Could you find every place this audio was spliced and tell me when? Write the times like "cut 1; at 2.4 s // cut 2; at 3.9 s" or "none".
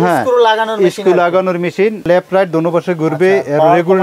cut 1; at 2.1 s